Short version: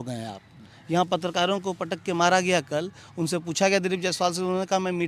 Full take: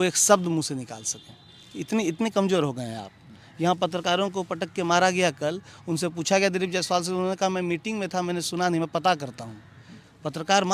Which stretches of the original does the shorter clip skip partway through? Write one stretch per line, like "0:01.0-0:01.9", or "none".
none